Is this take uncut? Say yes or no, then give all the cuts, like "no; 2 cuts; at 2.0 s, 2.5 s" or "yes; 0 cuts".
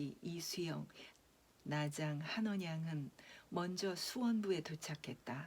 no; 1 cut; at 1.0 s